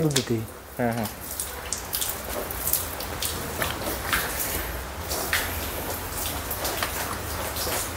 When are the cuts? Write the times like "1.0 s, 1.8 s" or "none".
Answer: none